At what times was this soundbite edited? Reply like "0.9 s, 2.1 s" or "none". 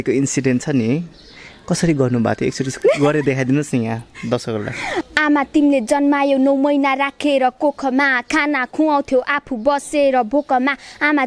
5.1 s